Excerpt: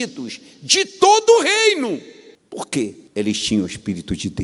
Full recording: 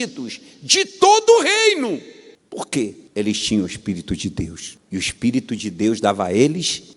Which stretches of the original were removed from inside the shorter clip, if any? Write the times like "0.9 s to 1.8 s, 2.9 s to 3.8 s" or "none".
none